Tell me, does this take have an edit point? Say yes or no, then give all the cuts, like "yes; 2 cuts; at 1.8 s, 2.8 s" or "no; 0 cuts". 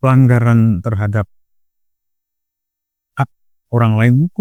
no; 0 cuts